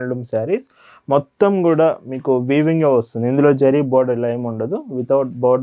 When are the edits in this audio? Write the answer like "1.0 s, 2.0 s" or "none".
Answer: none

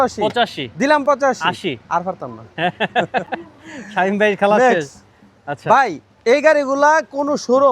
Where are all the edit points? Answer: none

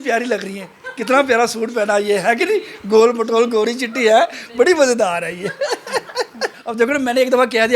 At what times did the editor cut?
6.6 s

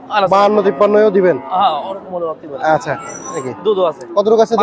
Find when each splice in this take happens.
3.4 s

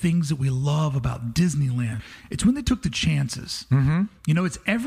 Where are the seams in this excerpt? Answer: 2.0 s

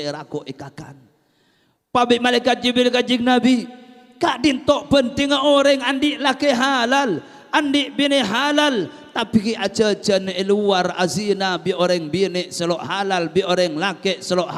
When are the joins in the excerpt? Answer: none

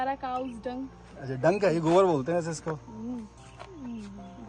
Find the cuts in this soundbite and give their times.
none

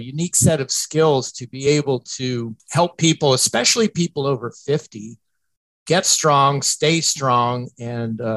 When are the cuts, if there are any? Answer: 2.6 s

